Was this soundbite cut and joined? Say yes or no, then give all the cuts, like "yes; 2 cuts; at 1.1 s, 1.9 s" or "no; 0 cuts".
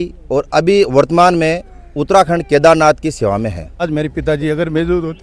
yes; 1 cut; at 3.9 s